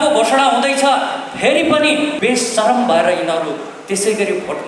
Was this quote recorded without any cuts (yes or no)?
no